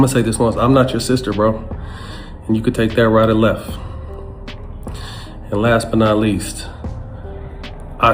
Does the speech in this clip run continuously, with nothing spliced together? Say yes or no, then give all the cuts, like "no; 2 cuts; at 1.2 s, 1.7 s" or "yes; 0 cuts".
yes; 0 cuts